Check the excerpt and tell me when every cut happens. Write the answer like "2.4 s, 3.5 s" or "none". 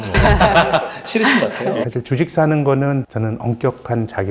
1.8 s, 3.1 s